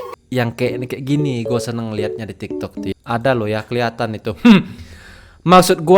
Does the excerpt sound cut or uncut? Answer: cut